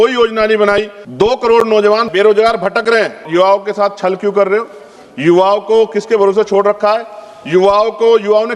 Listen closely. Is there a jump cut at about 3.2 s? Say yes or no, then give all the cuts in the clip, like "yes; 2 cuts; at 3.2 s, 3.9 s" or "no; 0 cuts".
yes; 3 cuts; at 1.0 s, 2.1 s, 3.2 s